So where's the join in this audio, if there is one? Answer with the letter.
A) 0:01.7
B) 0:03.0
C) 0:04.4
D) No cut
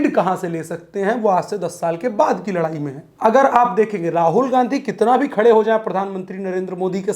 B